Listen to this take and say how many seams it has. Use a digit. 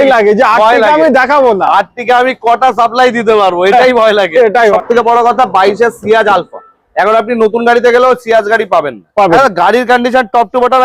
2